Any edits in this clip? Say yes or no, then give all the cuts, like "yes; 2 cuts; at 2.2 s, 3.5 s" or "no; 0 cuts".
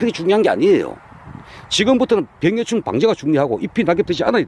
no; 0 cuts